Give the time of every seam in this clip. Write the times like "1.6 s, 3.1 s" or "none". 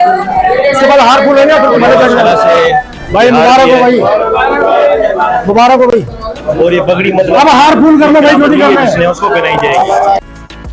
none